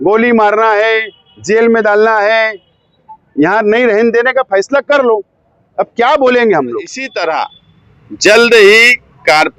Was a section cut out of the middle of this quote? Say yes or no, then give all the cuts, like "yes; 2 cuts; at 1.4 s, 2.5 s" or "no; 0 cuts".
yes; 1 cut; at 7.1 s